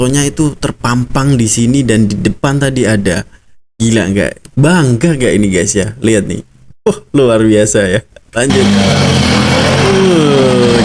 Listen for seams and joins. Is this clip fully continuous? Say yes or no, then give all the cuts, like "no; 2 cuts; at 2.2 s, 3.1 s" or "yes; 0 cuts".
yes; 0 cuts